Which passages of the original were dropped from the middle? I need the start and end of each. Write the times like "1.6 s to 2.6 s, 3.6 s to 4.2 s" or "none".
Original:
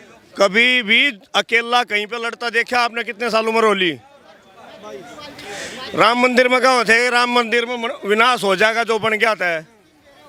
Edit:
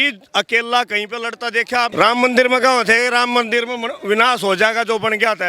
2.9 s to 5.9 s